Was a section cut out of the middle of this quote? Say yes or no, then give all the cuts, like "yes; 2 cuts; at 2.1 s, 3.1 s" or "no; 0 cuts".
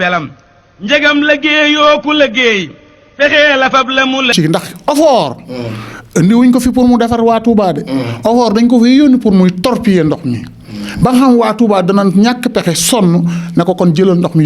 yes; 1 cut; at 4.3 s